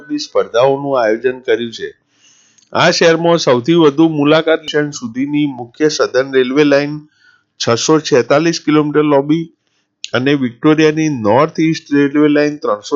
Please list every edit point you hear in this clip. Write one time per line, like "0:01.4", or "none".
0:04.6